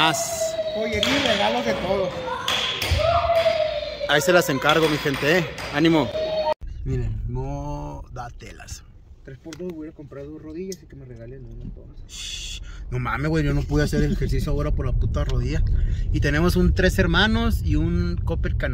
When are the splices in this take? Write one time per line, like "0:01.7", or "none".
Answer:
none